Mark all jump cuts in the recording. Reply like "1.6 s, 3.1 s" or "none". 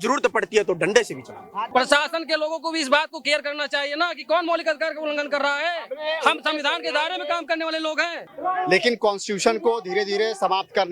1.7 s, 8.2 s